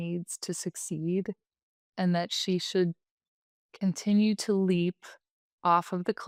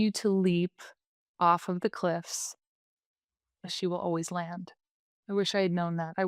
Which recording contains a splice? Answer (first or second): second